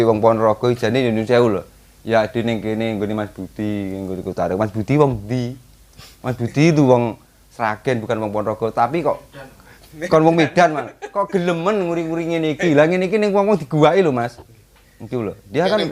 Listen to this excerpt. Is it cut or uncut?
uncut